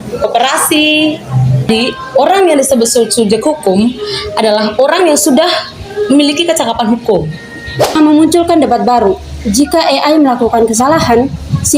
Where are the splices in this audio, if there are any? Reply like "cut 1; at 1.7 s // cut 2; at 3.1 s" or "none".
cut 1; at 1.7 s // cut 2; at 8.0 s